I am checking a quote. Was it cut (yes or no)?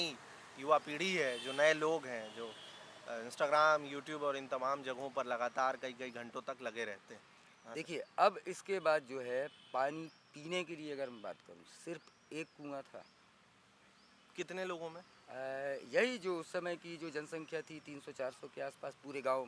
no